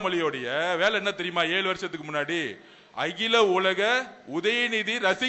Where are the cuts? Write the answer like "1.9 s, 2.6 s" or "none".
none